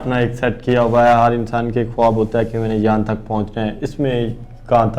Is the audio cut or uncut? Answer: uncut